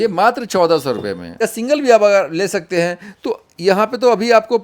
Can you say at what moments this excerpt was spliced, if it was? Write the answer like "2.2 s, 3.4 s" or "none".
1.3 s